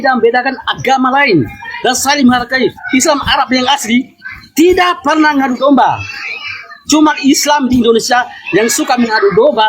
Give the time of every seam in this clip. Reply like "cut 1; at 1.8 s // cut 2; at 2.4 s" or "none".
cut 1; at 2.8 s